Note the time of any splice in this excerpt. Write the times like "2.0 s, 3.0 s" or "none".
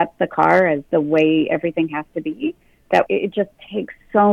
0.8 s, 3.1 s